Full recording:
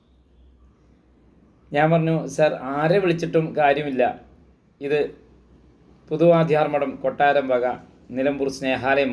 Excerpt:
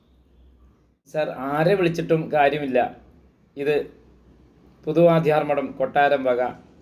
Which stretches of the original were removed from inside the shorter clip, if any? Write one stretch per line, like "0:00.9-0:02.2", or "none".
0:01.1-0:02.4